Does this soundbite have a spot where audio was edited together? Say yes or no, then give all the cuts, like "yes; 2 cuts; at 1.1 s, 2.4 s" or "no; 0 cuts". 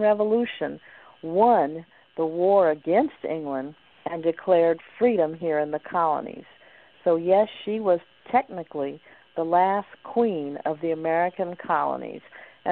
no; 0 cuts